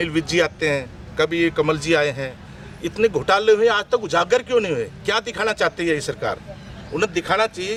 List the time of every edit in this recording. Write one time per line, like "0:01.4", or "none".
none